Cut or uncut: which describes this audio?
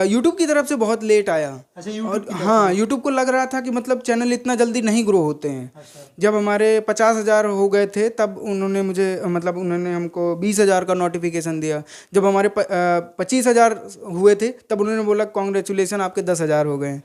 uncut